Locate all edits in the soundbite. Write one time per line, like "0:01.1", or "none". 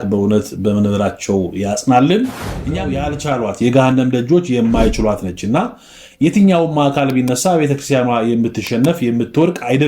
0:02.6